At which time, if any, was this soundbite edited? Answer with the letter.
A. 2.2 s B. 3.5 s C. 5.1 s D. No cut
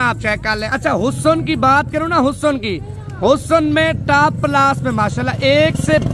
D